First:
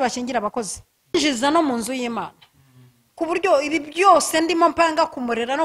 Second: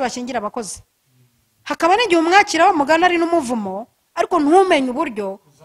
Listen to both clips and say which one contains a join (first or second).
first